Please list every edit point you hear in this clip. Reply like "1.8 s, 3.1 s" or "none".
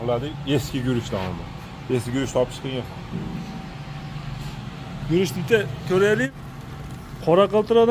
6.3 s